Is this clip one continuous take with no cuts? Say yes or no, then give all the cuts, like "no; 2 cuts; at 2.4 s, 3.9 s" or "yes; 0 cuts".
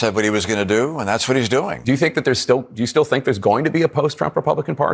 no; 1 cut; at 1.8 s